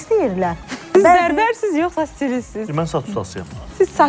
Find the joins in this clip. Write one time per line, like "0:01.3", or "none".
0:00.9